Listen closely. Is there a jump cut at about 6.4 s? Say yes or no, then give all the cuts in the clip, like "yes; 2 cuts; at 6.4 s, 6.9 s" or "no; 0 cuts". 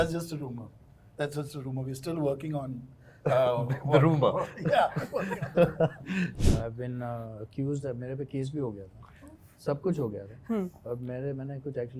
yes; 1 cut; at 6.4 s